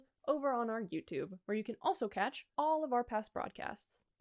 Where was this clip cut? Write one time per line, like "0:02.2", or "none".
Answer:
none

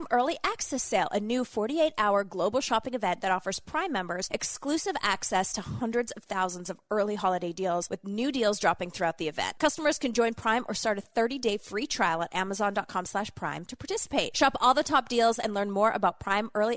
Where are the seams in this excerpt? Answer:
0:04.2
0:07.9
0:09.5
0:14.3

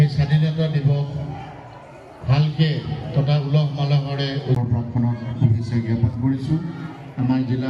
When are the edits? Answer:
0:04.6

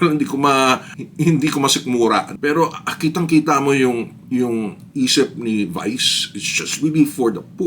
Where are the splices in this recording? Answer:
0:02.3

